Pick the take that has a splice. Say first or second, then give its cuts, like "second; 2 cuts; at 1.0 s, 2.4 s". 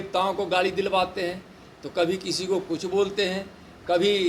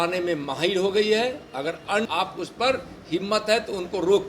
second; 1 cut; at 2.1 s